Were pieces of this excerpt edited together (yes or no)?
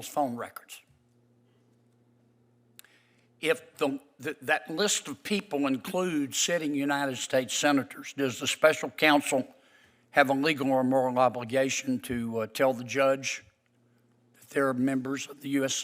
no